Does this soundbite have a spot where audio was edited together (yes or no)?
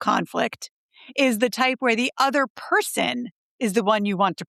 no